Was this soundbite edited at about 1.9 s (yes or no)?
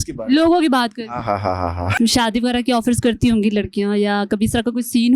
yes